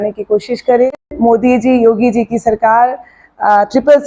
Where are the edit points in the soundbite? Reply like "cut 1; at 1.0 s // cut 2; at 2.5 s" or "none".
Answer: cut 1; at 1.1 s